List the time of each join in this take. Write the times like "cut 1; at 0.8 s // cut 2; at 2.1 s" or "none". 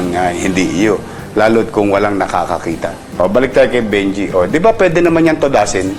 cut 1; at 3.0 s